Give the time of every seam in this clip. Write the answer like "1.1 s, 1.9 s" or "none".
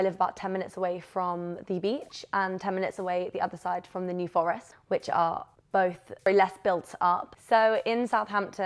6.3 s